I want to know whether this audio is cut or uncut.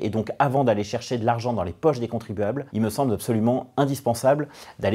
uncut